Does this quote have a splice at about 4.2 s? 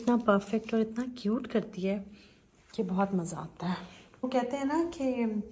yes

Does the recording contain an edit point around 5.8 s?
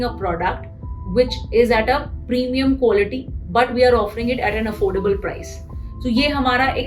no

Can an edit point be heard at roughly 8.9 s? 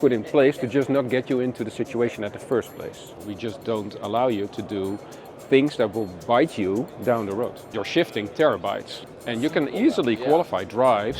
yes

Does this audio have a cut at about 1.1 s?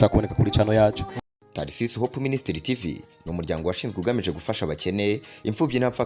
yes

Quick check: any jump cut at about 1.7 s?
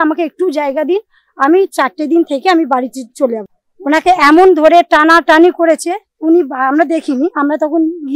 no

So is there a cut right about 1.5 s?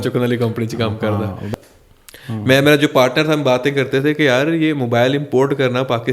yes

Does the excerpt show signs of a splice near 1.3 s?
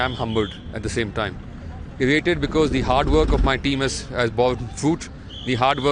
no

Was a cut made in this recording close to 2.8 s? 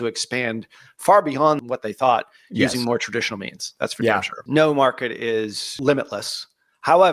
no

